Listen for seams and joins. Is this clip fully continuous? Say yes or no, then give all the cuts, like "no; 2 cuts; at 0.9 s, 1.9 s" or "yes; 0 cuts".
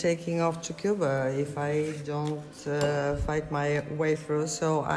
yes; 0 cuts